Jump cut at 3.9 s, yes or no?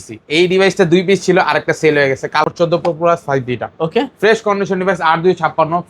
no